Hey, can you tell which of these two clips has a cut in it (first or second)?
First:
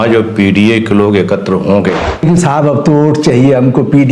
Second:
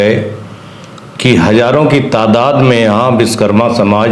first